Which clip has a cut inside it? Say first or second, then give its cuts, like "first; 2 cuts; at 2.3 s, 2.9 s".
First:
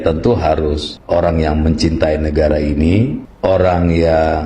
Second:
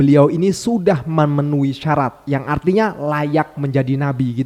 first; 2 cuts; at 0.9 s, 3.2 s